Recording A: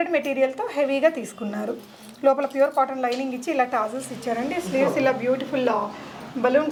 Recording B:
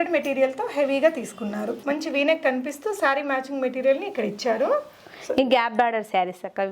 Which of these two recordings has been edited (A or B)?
B